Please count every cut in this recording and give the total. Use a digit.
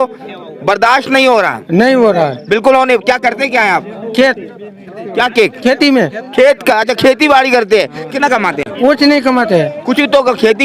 1